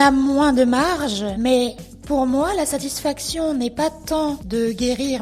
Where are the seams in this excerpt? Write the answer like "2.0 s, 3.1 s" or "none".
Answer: 1.3 s